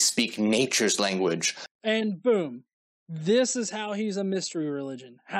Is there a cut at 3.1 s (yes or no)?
no